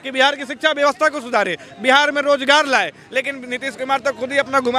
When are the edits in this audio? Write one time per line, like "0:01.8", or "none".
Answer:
none